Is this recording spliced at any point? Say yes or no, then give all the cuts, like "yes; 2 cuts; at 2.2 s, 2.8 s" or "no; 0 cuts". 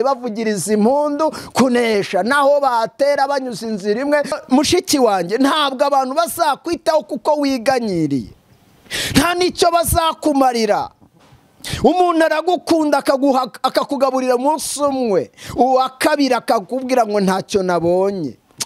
yes; 1 cut; at 4.3 s